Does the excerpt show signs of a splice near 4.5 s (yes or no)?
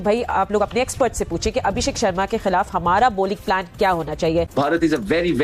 yes